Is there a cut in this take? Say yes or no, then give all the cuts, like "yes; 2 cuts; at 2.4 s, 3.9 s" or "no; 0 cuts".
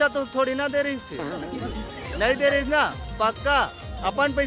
no; 0 cuts